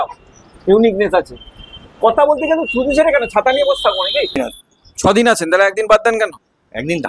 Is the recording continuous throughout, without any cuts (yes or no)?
no